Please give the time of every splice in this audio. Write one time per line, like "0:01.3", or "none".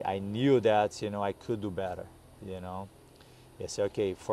none